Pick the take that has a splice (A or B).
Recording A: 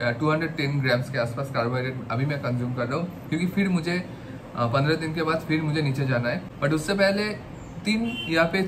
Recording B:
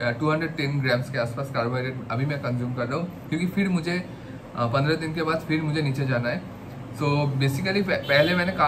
A